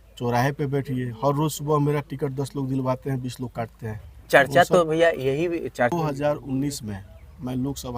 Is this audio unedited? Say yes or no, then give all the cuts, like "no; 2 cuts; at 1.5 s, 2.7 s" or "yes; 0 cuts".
no; 1 cut; at 5.9 s